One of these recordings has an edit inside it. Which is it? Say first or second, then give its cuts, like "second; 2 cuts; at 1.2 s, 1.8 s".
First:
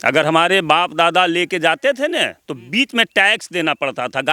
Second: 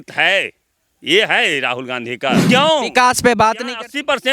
second; 1 cut; at 2.4 s